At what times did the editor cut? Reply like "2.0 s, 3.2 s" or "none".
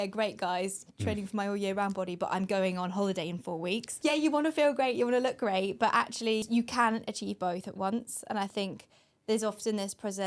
3.9 s, 6.5 s